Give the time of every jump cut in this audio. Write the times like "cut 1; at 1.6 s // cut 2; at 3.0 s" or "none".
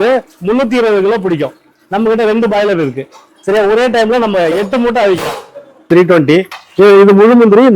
cut 1; at 5.8 s